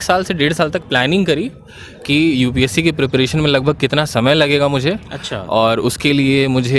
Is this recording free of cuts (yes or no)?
yes